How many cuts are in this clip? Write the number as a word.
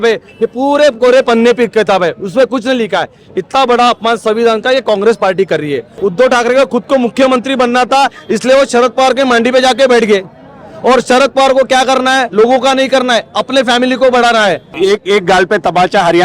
two